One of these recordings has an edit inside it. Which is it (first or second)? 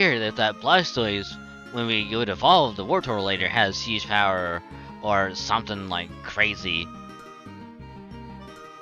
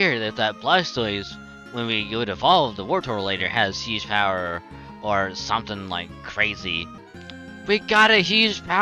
second